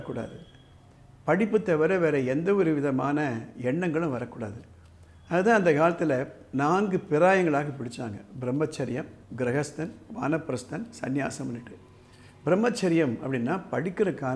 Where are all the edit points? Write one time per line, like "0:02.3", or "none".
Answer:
none

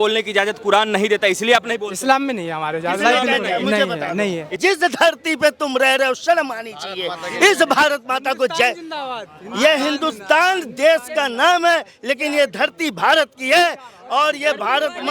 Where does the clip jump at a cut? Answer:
0:04.5

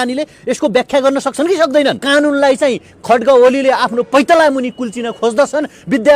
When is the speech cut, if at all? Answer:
0:02.0

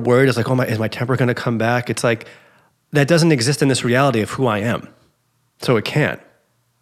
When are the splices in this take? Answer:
none

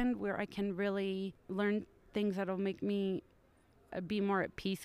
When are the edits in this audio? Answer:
0:01.4

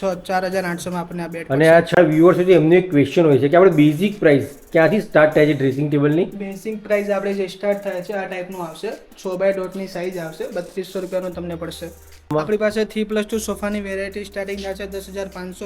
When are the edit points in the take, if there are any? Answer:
0:02.0
0:12.3

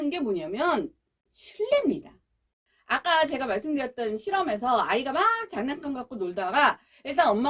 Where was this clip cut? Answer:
0:02.7

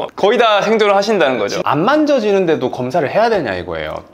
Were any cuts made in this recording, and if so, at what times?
0:01.6

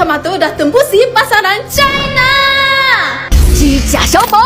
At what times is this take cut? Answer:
none

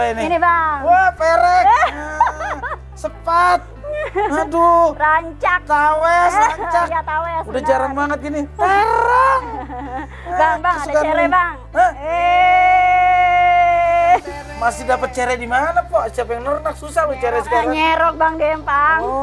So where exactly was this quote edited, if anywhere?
none

